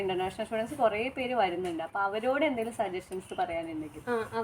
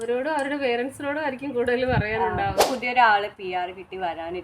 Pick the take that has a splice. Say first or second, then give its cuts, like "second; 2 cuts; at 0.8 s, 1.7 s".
second; 1 cut; at 2.6 s